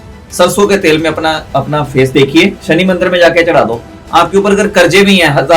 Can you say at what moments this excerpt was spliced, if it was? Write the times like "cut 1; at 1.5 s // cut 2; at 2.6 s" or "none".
cut 1; at 1.4 s // cut 2; at 2.6 s